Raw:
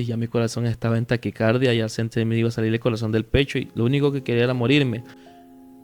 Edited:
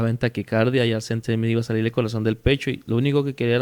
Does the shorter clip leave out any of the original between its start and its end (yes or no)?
no